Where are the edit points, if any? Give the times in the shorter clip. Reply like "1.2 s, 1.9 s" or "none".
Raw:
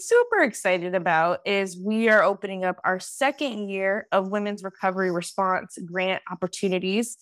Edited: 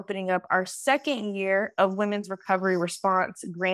none

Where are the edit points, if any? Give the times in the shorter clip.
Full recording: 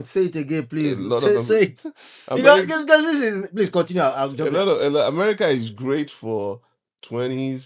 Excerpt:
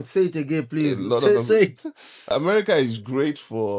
2.3 s

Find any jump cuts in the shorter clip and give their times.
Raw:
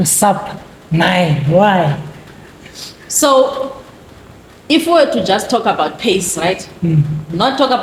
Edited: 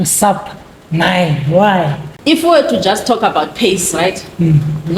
2.1 s

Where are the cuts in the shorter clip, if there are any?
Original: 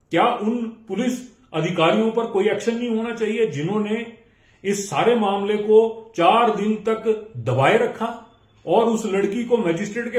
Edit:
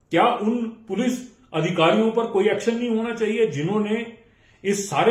none

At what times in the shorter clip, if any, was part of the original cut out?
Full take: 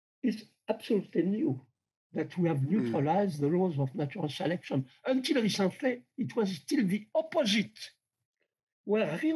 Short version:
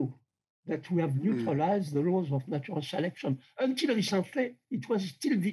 none

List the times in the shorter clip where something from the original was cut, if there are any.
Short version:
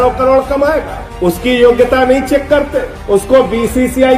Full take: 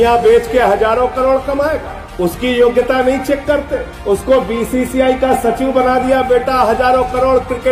none

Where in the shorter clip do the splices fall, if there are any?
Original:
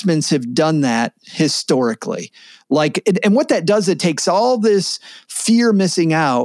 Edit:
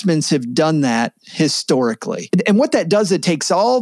2.3 s

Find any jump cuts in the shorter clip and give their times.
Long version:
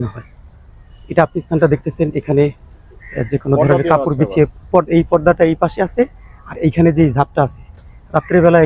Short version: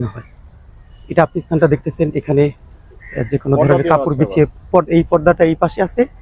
none

